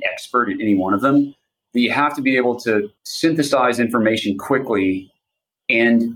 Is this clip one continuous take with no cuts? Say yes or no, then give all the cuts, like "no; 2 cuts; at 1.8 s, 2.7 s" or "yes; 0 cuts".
yes; 0 cuts